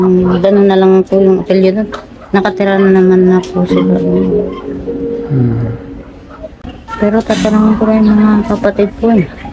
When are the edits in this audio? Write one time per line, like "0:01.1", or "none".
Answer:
0:06.5